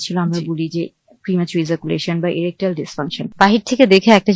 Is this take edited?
yes; 1 cut; at 3.1 s

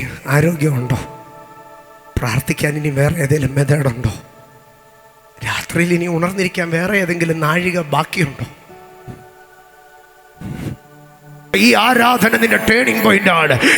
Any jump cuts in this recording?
yes; 1 cut; at 11.5 s

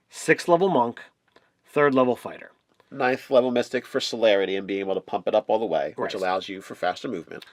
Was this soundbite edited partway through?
no; 0 cuts

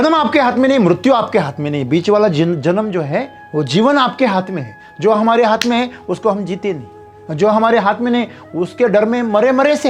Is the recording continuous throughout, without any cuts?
yes; 0 cuts

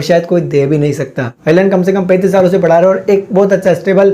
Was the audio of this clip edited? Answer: yes; 1 cut; at 1.4 s

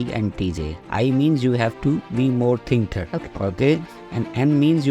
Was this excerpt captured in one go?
no; 1 cut; at 3.0 s

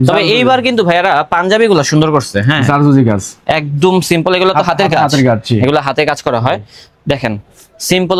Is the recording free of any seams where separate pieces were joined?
yes; 0 cuts

